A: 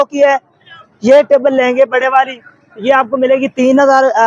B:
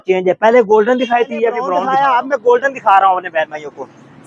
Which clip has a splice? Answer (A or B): B